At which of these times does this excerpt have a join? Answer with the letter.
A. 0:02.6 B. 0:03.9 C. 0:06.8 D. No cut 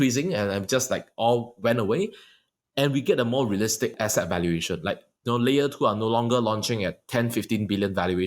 B